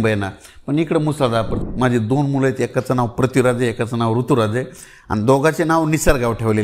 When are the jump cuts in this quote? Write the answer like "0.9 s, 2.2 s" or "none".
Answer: 1.6 s